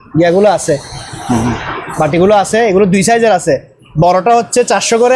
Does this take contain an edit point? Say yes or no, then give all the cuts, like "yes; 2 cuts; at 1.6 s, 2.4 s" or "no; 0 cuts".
no; 0 cuts